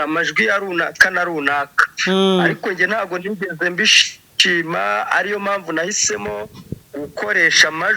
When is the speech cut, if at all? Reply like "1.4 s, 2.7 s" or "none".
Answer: none